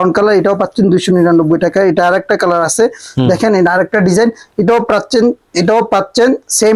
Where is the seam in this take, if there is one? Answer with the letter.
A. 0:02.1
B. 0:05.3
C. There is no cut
C